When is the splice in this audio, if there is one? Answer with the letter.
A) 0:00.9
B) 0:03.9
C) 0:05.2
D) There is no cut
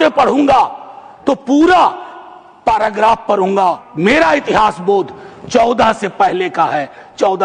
B